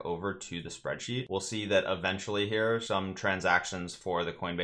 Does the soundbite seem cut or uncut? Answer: cut